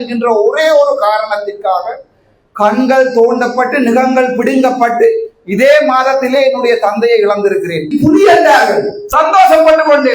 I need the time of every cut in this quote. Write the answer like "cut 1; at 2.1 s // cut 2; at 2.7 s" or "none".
cut 1; at 7.9 s